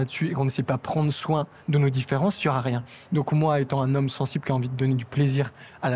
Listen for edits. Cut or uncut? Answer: uncut